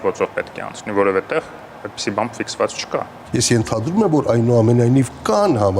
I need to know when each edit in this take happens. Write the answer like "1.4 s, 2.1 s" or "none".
3.2 s